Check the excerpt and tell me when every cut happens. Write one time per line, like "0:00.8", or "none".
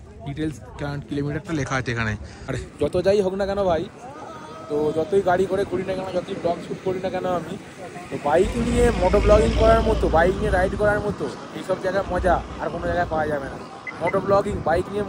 0:02.5